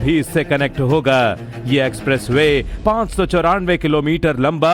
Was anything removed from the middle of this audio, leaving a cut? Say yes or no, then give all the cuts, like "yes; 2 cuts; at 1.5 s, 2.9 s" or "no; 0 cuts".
yes; 1 cut; at 2.7 s